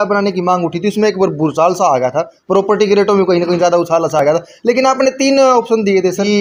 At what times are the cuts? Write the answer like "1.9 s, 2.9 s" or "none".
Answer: none